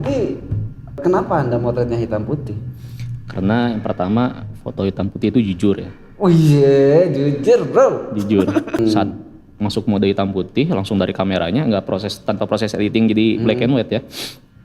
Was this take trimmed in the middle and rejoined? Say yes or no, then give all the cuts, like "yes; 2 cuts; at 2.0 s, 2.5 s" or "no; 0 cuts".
yes; 2 cuts; at 1.0 s, 8.8 s